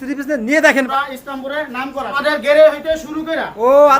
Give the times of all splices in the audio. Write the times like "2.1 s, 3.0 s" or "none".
0.9 s, 2.2 s